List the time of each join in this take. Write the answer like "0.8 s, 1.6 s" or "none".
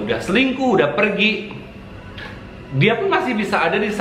none